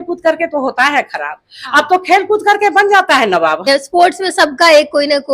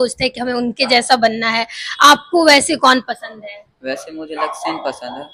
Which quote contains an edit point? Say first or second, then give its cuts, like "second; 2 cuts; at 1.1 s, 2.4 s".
first; 1 cut; at 3.7 s